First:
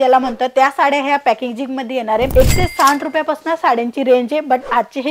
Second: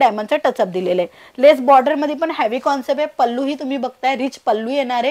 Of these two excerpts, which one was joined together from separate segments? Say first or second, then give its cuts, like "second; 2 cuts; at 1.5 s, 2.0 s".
first; 1 cut; at 2.3 s